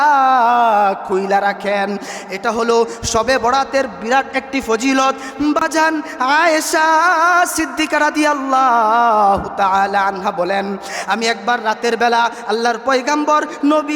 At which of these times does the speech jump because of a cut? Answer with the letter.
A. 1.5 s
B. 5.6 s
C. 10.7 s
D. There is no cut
B